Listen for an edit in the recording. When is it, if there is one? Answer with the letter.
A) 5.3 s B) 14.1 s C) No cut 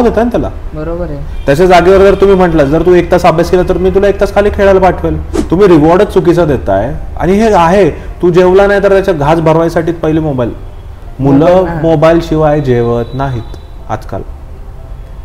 A